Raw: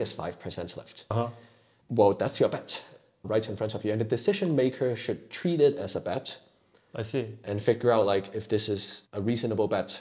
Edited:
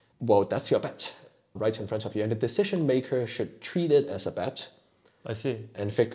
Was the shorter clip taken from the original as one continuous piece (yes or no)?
yes